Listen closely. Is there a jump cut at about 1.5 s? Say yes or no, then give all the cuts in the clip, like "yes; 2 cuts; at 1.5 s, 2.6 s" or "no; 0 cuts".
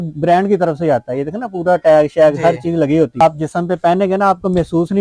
no; 1 cut; at 3.2 s